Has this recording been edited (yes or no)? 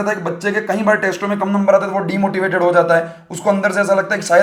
no